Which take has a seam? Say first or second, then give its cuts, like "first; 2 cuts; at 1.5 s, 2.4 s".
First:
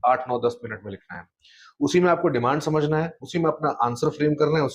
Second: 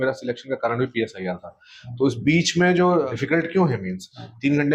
second; 1 cut; at 3.1 s